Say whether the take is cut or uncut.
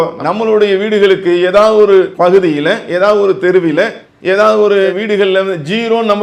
uncut